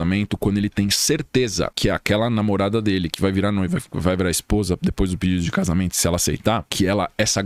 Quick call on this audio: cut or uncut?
uncut